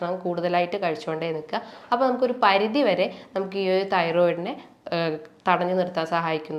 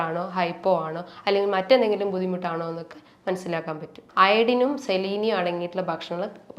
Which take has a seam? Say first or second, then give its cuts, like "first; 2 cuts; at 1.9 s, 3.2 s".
second; 1 cut; at 4.0 s